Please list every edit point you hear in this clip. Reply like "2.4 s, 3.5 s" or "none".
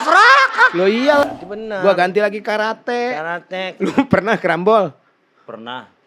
1.2 s